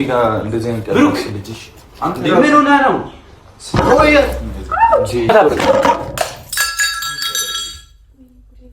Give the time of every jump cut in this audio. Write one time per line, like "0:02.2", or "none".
0:05.3